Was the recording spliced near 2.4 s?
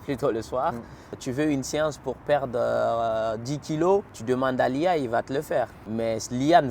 no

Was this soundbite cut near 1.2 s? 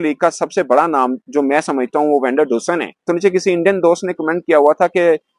no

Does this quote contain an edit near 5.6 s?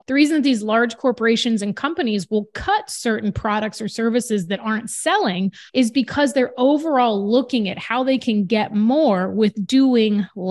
yes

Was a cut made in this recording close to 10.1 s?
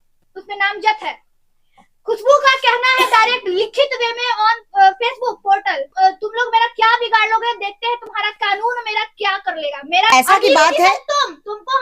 yes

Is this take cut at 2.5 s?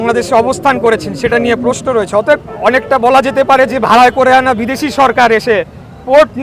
yes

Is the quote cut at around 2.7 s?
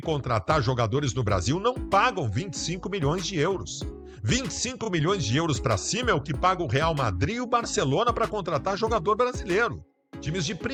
no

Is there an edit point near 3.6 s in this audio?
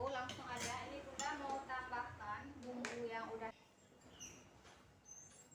yes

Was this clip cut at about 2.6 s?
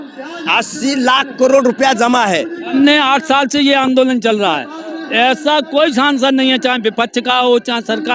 yes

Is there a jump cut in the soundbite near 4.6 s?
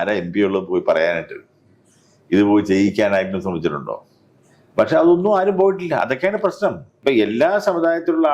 no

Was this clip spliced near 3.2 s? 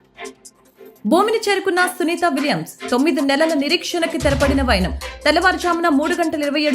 no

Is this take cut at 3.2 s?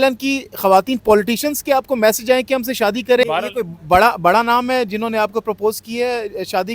yes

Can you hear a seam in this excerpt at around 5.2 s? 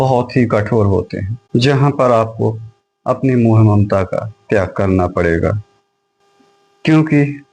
no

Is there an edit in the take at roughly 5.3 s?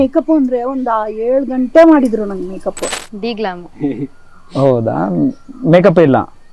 no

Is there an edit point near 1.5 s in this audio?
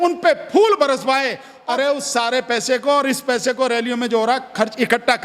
yes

